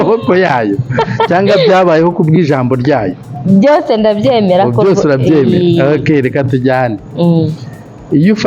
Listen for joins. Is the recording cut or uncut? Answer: uncut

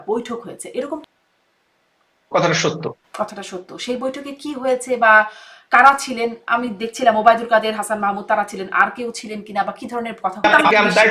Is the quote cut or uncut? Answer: cut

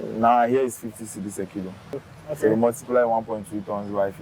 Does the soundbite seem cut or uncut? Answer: cut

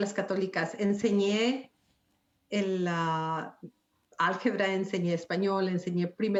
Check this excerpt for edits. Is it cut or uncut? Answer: uncut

